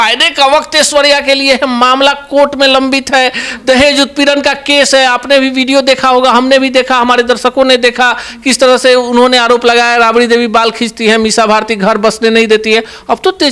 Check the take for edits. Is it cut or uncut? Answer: uncut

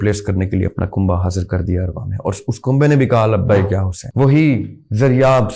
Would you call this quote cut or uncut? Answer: cut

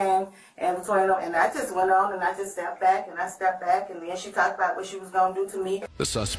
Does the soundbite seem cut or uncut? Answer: uncut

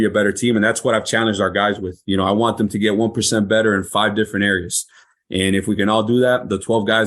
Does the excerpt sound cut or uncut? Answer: uncut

